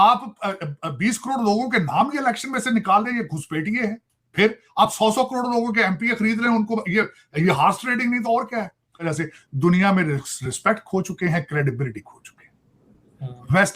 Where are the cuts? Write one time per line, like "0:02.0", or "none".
0:09.0